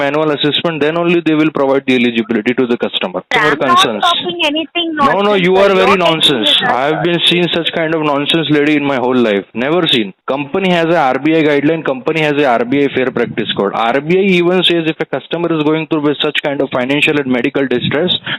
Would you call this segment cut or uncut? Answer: cut